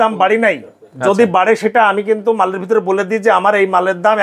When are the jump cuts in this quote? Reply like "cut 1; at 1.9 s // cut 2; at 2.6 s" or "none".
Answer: none